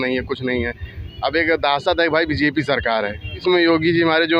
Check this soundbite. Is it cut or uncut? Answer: cut